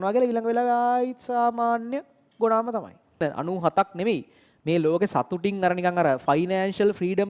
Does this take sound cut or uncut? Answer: cut